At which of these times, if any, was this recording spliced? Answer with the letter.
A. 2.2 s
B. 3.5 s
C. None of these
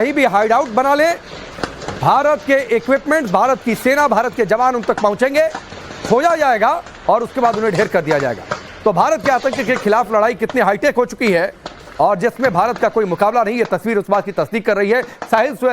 A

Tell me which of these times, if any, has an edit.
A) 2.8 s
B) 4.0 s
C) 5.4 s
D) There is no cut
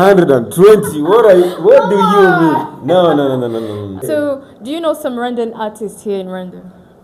B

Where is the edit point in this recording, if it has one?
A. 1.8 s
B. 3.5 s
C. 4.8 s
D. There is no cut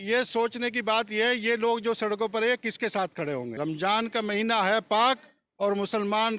B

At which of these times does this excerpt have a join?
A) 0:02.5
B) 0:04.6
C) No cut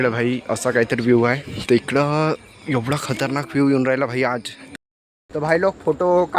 B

